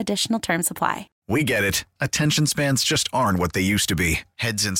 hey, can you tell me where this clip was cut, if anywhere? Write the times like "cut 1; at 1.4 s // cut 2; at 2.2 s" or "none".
cut 1; at 1.1 s